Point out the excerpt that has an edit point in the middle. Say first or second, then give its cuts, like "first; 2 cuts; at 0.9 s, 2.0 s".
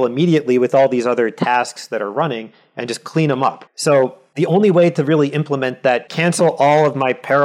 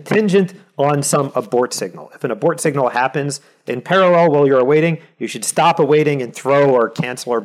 first; 3 cuts; at 3.6 s, 4.2 s, 6.1 s